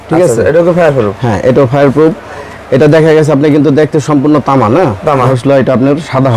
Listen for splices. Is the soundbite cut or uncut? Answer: cut